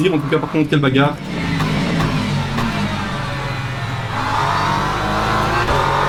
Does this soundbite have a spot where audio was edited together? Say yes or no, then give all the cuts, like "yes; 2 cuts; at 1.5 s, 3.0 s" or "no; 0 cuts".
no; 0 cuts